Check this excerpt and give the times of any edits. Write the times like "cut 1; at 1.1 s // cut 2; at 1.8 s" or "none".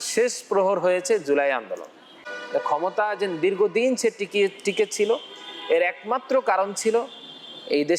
cut 1; at 2.3 s